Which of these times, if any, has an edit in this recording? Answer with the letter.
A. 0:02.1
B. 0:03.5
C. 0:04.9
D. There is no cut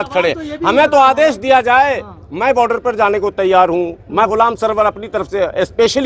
D